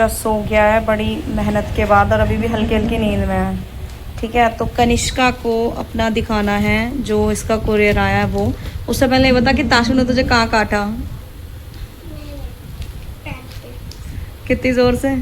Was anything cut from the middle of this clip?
no; 0 cuts

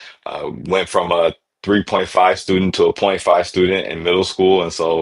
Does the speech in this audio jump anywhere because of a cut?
no; 0 cuts

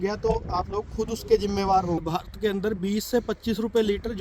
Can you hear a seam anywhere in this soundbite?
yes; 1 cut; at 2.0 s

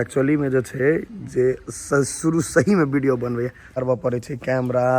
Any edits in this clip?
yes; 1 cut; at 3.6 s

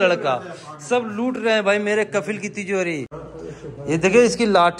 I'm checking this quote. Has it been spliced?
yes; 1 cut; at 3.3 s

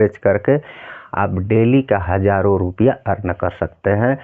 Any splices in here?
no; 0 cuts

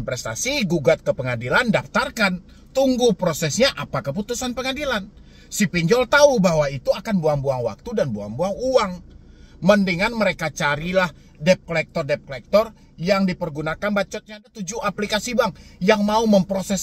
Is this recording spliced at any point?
yes; 1 cut; at 14.5 s

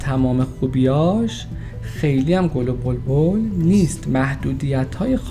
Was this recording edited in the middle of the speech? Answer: no; 0 cuts

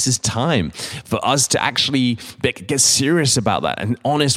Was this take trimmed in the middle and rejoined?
no; 0 cuts

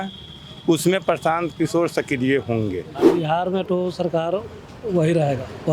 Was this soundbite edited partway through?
yes; 1 cut; at 2.9 s

